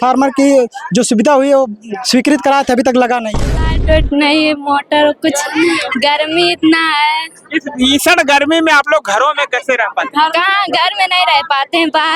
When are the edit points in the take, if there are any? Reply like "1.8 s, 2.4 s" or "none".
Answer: 3.5 s